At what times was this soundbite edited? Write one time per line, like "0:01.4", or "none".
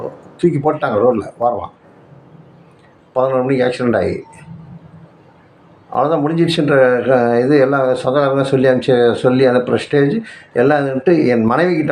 none